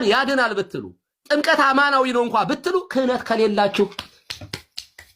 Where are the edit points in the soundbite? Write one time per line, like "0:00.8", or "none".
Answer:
0:02.7